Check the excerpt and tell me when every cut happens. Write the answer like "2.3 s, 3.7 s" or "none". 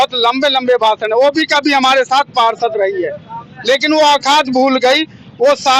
none